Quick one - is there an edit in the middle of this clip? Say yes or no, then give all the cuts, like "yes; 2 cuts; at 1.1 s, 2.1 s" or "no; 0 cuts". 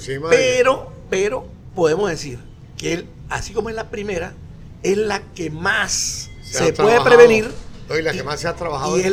no; 0 cuts